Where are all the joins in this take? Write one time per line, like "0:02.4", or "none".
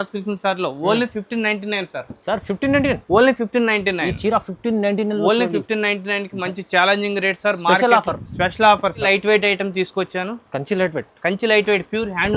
0:09.0